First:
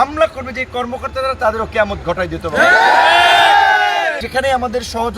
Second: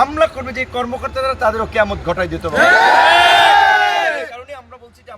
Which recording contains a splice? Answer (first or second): first